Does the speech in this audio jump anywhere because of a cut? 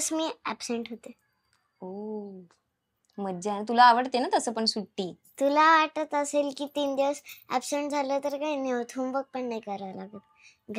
no; 0 cuts

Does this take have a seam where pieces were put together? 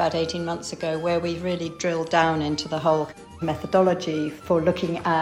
yes; 1 cut; at 3.3 s

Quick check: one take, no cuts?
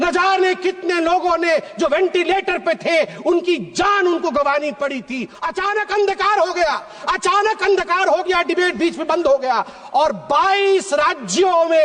no; 1 cut; at 5.2 s

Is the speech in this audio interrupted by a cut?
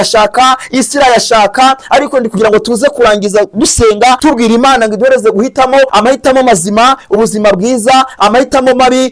yes; 2 cuts; at 4.2 s, 5.9 s

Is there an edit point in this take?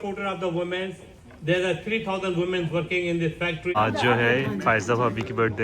yes; 1 cut; at 3.8 s

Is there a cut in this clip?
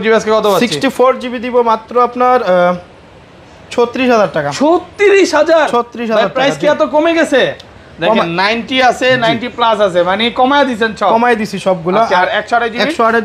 no; 0 cuts

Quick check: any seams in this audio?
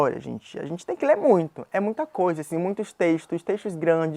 no; 0 cuts

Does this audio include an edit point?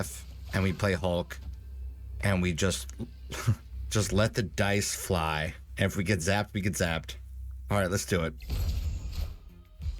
yes; 3 cuts; at 3.7 s, 5.6 s, 8.4 s

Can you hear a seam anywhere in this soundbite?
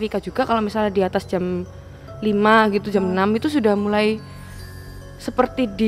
no; 0 cuts

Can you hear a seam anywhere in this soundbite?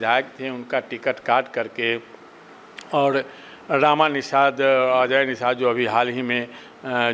no; 0 cuts

